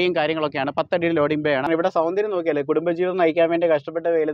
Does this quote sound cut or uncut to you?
cut